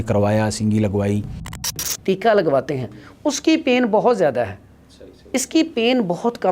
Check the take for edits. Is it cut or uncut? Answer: cut